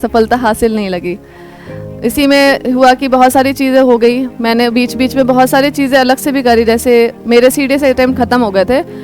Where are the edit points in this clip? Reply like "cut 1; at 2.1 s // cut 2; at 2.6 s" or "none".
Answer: none